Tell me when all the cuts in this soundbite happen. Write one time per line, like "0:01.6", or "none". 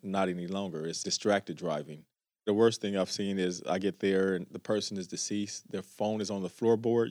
0:01.0
0:02.5